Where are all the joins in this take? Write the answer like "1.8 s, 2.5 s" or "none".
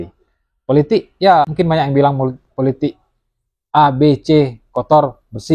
1.5 s